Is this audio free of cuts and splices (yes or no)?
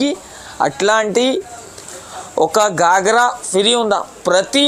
yes